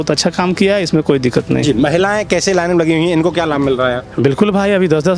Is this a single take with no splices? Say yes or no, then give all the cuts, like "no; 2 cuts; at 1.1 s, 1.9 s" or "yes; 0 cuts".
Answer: yes; 0 cuts